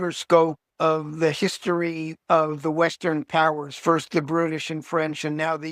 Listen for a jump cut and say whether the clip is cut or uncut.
cut